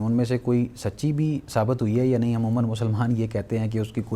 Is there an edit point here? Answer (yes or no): no